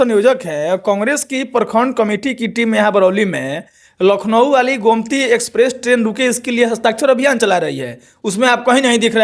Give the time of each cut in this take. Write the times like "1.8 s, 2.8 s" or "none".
none